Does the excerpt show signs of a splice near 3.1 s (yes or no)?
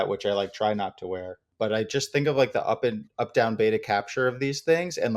no